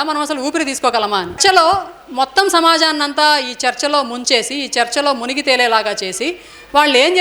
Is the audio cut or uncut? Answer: cut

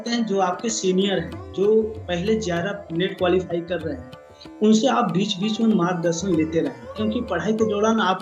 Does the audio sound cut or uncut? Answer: uncut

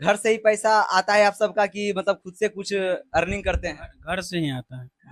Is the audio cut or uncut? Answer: uncut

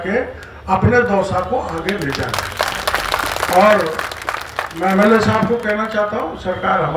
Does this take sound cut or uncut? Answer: uncut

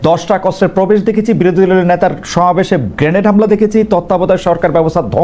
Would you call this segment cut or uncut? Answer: uncut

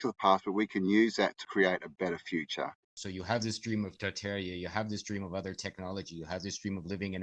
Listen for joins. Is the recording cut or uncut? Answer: cut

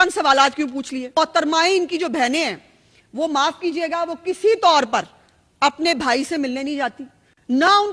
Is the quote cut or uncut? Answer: cut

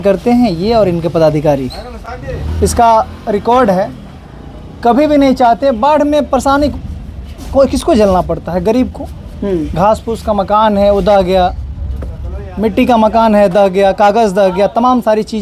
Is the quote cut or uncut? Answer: uncut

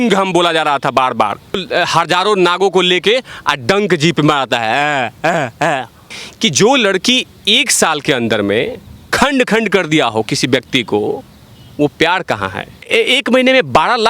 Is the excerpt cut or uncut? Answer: cut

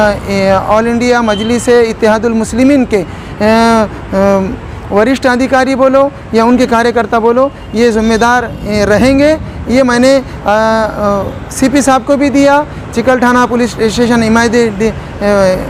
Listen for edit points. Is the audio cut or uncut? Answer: uncut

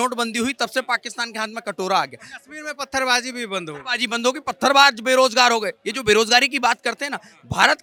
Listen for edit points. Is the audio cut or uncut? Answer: uncut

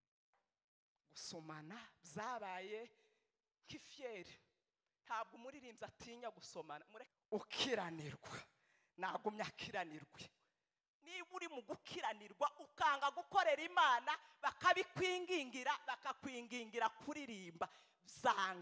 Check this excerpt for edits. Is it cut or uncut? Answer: cut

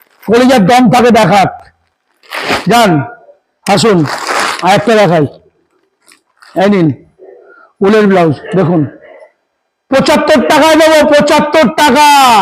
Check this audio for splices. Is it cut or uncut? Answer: uncut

